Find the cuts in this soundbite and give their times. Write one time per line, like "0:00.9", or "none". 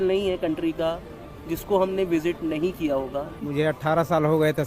0:03.4

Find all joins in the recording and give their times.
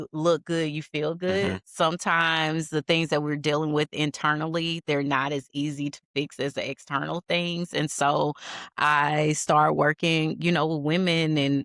none

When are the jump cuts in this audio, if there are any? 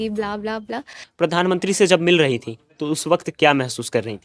0:01.0

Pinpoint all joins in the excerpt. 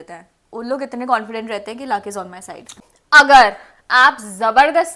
0:02.8

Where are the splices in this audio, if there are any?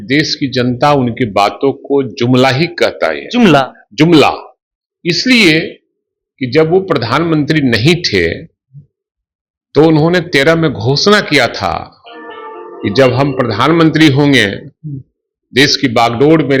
none

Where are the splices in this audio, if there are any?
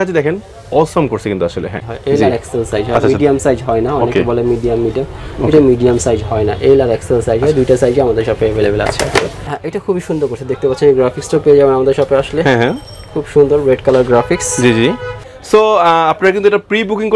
0:01.9
0:09.5
0:15.3

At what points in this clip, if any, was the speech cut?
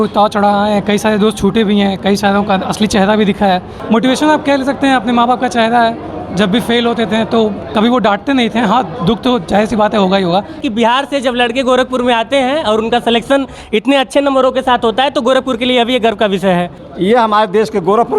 0:03.7
0:10.6
0:16.8

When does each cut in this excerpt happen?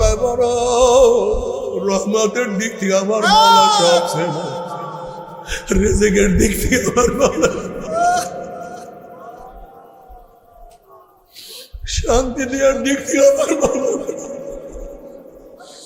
0:11.9

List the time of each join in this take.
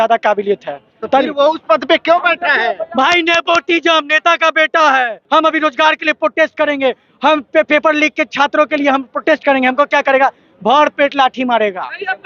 0:05.2

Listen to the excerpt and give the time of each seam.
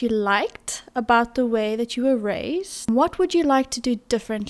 0:02.9

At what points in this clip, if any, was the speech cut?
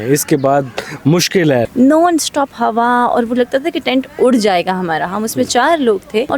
0:01.7

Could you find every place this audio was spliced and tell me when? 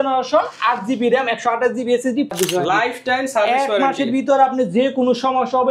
0:02.3

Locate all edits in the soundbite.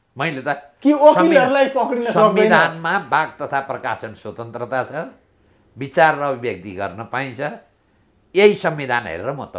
none

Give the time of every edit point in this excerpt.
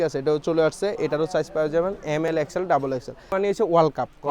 0:03.3

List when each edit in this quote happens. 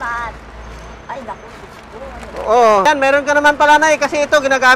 0:02.9

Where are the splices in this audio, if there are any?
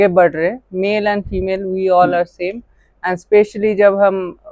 none

